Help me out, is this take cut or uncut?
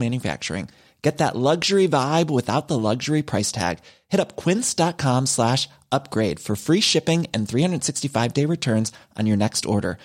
uncut